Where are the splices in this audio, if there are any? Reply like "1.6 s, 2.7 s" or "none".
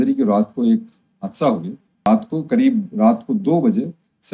1.8 s